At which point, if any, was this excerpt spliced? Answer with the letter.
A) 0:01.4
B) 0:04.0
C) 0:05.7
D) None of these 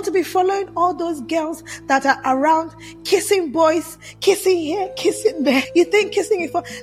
C